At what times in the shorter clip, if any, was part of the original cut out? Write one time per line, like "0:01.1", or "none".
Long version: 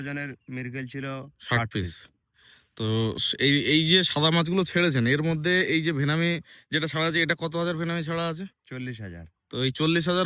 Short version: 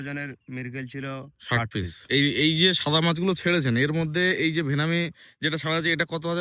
0:02.0